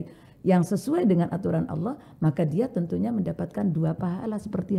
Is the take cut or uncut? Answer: uncut